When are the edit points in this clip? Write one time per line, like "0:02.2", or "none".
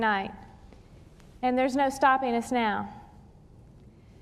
0:02.9